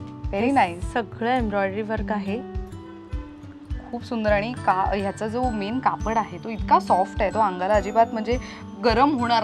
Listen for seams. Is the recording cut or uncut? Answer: uncut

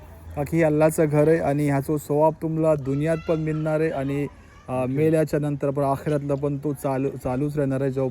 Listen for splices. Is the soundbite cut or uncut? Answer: uncut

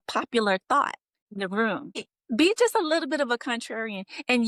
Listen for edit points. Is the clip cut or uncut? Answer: cut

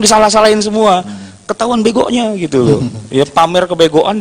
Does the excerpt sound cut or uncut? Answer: uncut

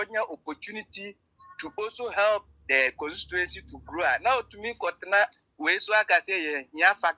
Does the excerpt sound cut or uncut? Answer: uncut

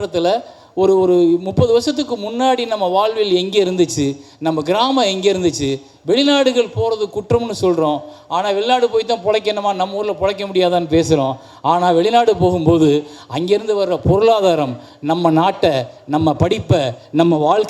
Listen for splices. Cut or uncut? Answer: uncut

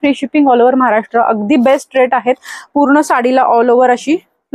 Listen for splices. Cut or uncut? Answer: uncut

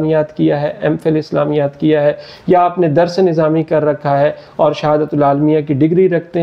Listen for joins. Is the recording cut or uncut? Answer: uncut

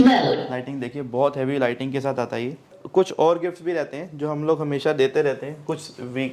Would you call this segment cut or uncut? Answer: cut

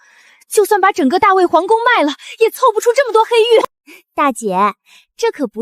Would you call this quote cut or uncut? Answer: cut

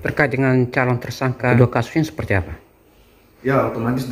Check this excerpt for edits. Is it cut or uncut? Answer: cut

